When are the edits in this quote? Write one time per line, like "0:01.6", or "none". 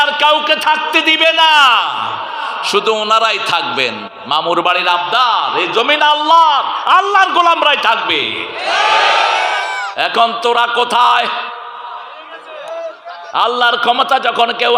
none

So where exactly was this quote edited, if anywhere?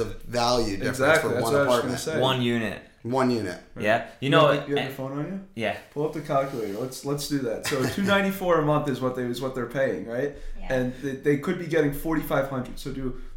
none

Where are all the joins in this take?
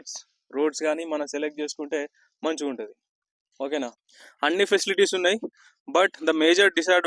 0:04.0

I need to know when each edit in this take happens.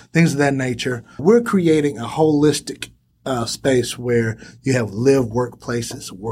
0:01.2

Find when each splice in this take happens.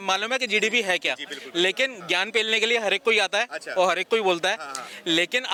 none

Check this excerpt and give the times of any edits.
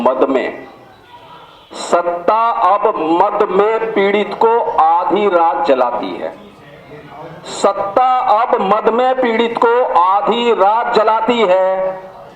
none

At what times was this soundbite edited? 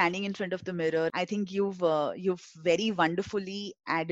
0:01.1

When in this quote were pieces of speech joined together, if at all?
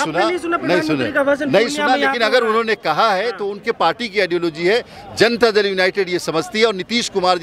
none

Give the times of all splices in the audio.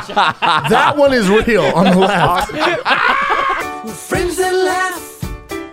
0:03.6

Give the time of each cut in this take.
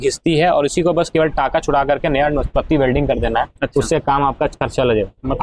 none

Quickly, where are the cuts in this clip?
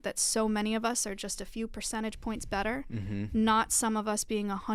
none

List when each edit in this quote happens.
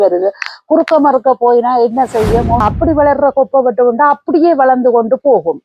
0:02.6

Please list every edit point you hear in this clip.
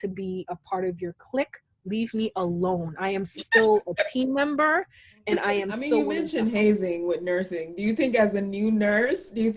0:06.1

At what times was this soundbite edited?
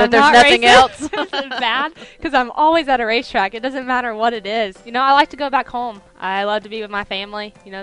none

